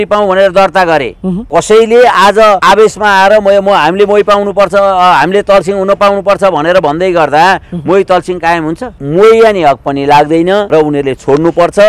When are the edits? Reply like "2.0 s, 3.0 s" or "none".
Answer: 1.4 s, 2.6 s, 8.9 s, 10.7 s